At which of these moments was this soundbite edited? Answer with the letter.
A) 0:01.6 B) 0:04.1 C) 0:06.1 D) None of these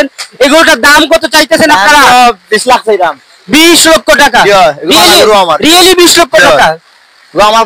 D